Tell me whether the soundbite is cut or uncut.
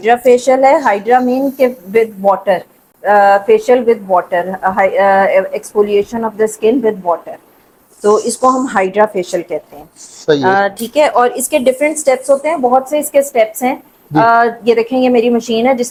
uncut